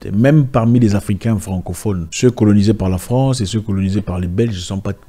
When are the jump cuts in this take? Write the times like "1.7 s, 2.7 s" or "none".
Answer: 2.1 s